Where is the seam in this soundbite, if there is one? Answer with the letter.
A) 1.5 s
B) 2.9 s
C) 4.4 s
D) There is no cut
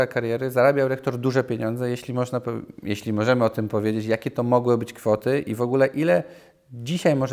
D